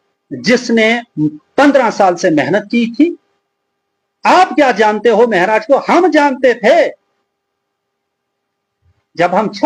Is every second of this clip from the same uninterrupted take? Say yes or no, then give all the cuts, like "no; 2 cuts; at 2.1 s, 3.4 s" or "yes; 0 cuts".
yes; 0 cuts